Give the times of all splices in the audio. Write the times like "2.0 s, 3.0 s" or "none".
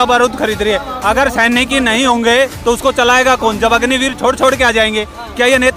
none